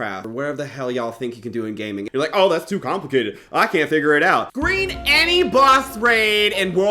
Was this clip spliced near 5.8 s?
no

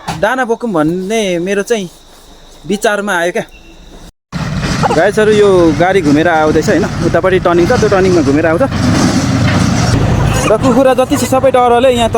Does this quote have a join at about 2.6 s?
no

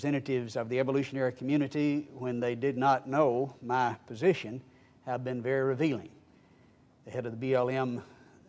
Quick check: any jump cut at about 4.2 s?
yes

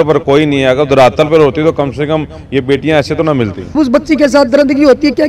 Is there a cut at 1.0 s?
no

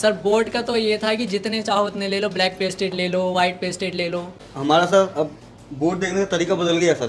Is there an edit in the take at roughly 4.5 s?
yes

